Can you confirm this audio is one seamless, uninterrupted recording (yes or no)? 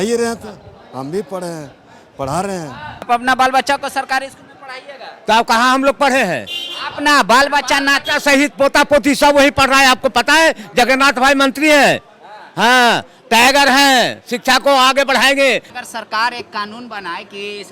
no